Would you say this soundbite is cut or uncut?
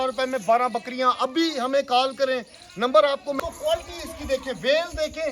cut